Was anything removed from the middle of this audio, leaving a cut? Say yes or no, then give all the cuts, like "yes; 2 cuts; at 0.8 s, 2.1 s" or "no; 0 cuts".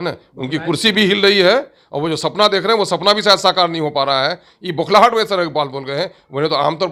no; 0 cuts